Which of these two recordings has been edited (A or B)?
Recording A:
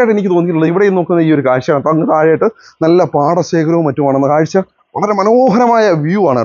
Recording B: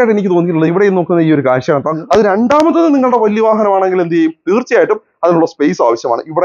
B